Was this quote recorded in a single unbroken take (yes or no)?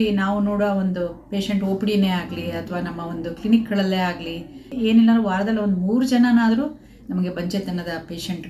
no